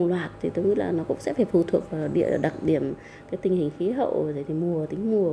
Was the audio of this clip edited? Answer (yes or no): no